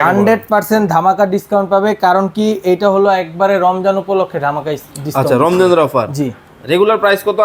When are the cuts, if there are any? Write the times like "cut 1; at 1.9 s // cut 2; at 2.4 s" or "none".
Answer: none